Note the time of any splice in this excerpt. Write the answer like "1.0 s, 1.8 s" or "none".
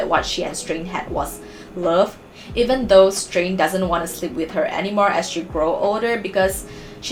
none